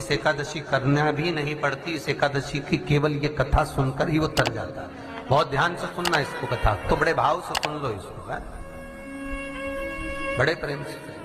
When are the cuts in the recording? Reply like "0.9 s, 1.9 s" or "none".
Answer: none